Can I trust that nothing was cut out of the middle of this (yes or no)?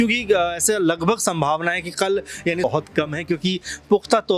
no